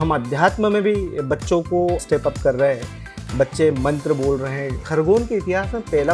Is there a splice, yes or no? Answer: yes